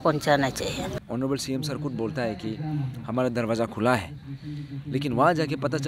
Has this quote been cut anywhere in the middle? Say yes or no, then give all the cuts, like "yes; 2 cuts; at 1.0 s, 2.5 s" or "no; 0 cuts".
yes; 1 cut; at 0.9 s